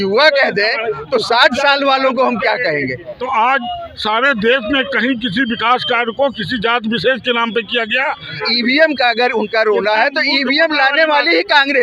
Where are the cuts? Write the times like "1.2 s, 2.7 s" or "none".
3.2 s, 8.5 s